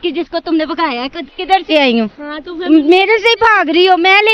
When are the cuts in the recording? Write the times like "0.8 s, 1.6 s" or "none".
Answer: 1.7 s